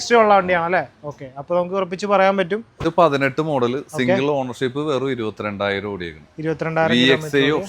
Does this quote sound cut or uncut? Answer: cut